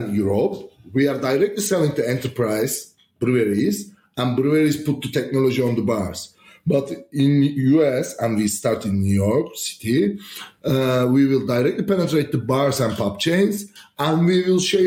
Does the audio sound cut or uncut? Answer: uncut